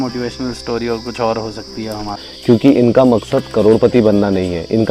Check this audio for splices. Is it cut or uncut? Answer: cut